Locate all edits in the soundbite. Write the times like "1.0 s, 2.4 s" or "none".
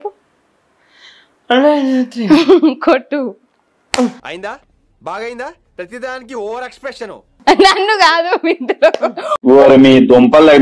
none